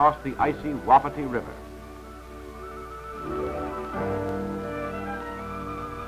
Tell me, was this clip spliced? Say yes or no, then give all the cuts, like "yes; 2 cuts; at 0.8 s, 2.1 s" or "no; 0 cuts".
yes; 1 cut; at 5.1 s